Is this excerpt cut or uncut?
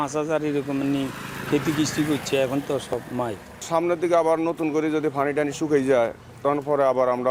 uncut